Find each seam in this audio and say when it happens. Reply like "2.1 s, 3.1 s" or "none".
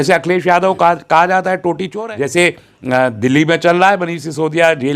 2.0 s